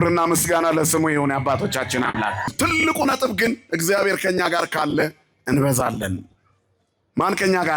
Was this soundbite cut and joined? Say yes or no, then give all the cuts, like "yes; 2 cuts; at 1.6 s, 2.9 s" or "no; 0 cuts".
yes; 1 cut; at 2.5 s